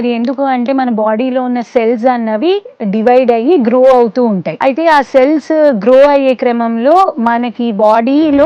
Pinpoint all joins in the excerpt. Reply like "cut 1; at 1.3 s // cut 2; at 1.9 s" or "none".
cut 1; at 4.5 s

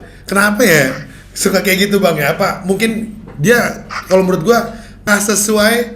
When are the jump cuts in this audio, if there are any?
cut 1; at 5.0 s

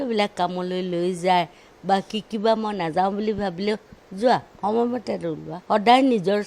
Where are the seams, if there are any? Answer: cut 1; at 5.5 s

